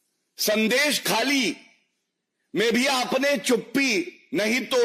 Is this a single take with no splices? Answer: yes; 0 cuts

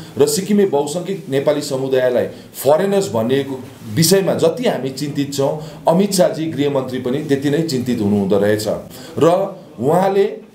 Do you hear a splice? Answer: no; 0 cuts

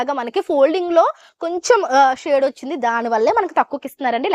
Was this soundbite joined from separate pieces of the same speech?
no; 0 cuts

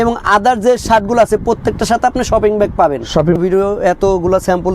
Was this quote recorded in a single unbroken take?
no; 1 cut; at 3.4 s

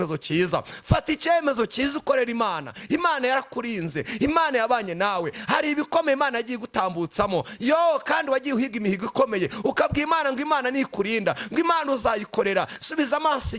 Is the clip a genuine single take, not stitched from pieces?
yes; 0 cuts

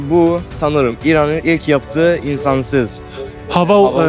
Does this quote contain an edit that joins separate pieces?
no; 0 cuts

